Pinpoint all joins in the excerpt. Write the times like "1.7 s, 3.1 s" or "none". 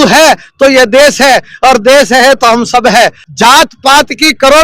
3.2 s